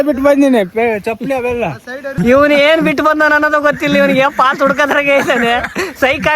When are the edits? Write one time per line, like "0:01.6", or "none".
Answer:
0:02.1